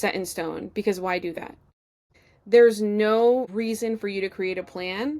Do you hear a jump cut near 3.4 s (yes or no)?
no